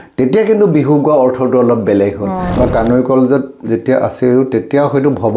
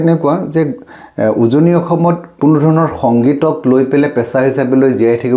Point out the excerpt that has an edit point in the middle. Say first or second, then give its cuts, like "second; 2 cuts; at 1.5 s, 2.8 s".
first; 1 cut; at 2.5 s